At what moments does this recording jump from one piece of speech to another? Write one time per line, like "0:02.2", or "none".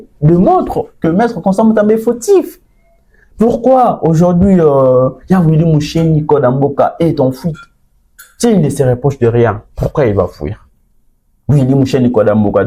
none